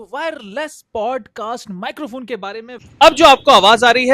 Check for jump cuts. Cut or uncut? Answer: cut